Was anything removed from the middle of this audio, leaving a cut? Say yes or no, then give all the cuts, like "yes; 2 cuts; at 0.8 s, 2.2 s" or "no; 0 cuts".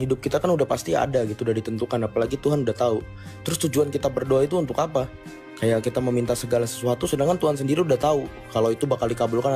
no; 0 cuts